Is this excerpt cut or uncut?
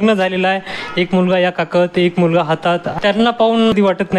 cut